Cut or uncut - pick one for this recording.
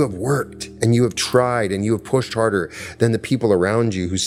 uncut